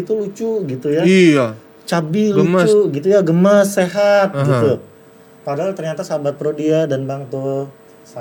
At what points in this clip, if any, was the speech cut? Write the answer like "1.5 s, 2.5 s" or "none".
none

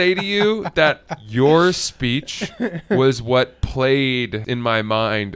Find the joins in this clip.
4.4 s

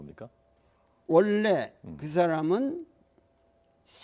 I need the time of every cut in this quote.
2.0 s

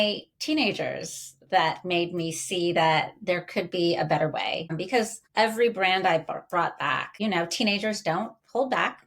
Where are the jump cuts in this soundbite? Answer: 4.8 s, 7.1 s

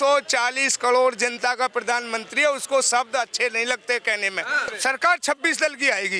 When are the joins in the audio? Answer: 4.7 s

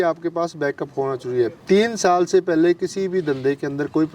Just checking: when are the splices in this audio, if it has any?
1.6 s

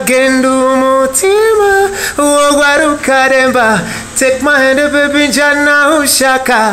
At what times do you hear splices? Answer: none

